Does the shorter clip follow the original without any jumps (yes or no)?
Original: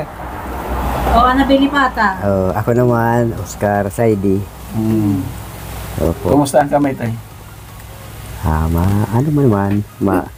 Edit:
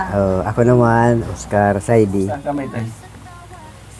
no